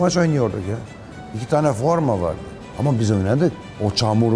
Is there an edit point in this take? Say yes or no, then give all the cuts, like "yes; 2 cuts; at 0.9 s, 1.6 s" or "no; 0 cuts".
no; 0 cuts